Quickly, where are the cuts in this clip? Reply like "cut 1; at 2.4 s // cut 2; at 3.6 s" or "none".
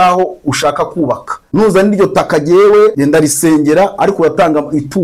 cut 1; at 1.3 s // cut 2; at 3.0 s